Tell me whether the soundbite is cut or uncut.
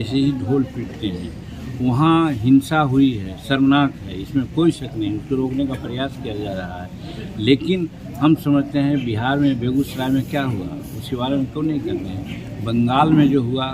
uncut